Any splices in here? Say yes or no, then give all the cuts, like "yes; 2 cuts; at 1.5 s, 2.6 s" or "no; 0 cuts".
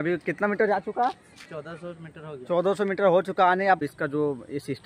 yes; 1 cut; at 3.8 s